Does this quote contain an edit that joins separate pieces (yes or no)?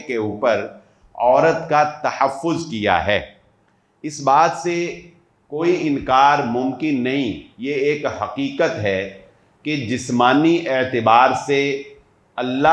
no